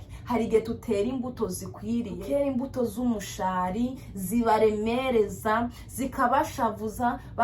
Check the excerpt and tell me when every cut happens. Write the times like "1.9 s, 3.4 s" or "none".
2.2 s